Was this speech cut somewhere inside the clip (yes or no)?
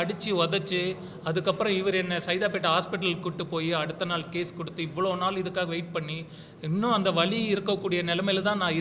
no